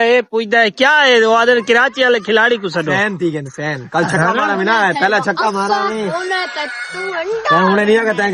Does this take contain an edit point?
no; 0 cuts

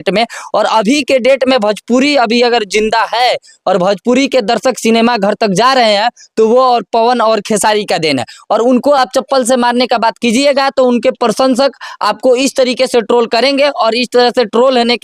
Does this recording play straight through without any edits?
yes; 0 cuts

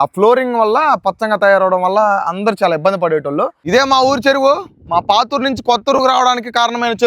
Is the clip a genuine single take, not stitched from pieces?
no; 1 cut; at 3.6 s

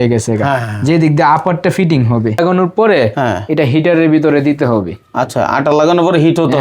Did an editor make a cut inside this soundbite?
yes; 1 cut; at 2.4 s

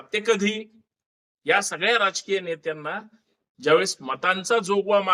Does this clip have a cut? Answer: no; 0 cuts

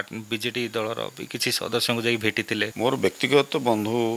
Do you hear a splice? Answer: yes; 1 cut; at 2.7 s

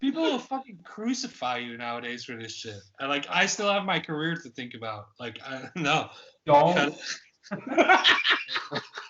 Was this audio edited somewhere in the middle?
no; 0 cuts

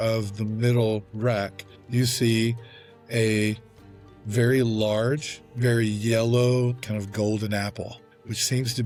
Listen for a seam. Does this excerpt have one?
no; 0 cuts

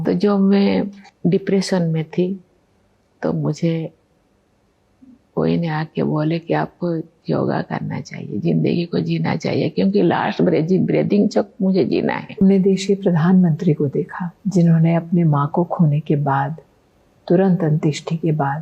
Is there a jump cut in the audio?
yes; 2 cuts; at 1.0 s, 12.4 s

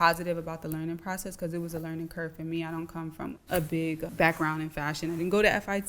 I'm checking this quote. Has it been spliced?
yes; 2 cuts; at 3.4 s, 4.1 s

